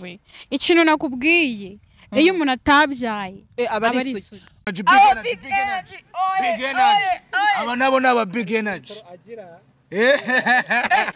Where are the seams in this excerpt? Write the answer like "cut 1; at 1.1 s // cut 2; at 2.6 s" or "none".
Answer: cut 1; at 4.6 s